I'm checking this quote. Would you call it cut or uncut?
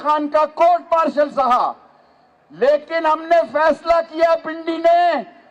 uncut